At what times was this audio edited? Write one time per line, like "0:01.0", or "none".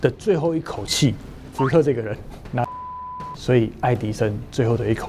0:02.9